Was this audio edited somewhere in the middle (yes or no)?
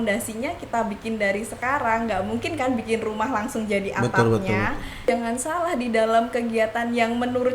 yes